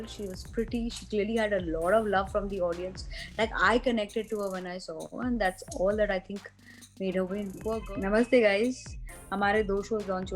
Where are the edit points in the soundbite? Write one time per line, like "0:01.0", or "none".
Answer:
0:07.6